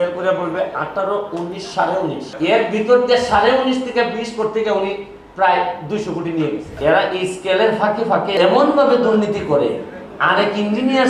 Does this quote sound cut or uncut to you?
cut